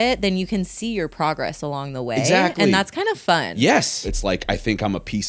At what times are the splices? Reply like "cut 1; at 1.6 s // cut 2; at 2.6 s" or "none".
cut 1; at 4.1 s